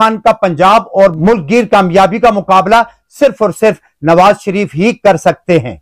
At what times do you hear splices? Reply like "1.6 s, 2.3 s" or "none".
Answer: none

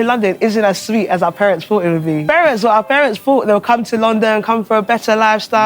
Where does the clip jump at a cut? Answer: 2.2 s

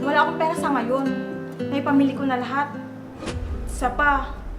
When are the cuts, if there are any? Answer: none

